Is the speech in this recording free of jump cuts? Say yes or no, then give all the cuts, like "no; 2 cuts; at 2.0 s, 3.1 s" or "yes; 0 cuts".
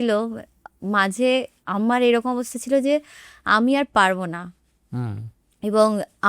yes; 0 cuts